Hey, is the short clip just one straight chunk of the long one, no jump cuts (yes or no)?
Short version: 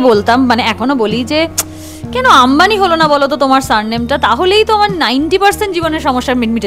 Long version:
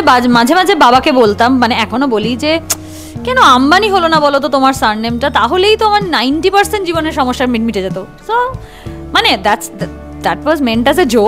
yes